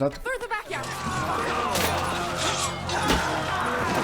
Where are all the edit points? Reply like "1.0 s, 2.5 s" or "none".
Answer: 1.0 s